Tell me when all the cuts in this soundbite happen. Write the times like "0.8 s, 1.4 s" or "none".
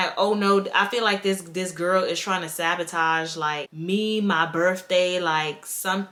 none